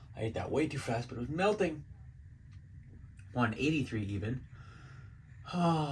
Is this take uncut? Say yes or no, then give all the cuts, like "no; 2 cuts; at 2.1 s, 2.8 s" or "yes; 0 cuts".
yes; 0 cuts